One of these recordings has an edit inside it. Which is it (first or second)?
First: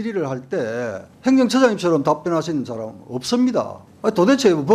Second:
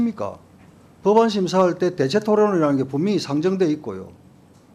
first